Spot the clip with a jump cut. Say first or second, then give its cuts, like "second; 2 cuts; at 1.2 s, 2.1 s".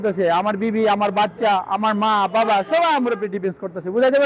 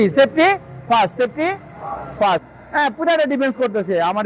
second; 1 cut; at 2.6 s